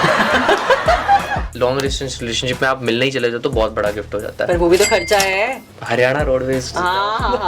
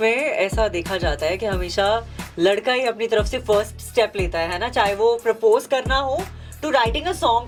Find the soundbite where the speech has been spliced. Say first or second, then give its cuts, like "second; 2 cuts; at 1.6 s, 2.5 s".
first; 2 cuts; at 1.5 s, 5.7 s